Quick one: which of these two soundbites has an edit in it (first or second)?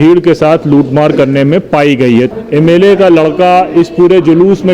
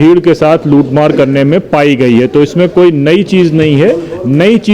first